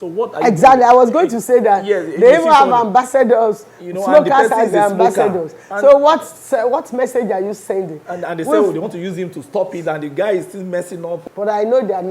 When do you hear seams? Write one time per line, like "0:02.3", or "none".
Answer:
0:11.2